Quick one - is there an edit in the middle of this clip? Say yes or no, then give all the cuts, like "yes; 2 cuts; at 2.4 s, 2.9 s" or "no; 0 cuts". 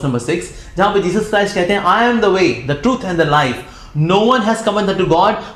no; 0 cuts